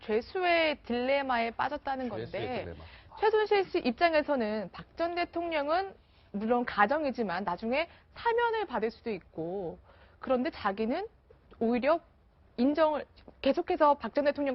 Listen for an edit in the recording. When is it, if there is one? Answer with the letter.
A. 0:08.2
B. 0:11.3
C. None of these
A